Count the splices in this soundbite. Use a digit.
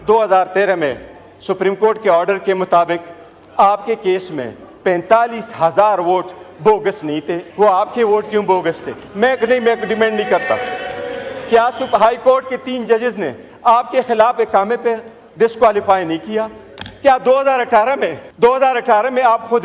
2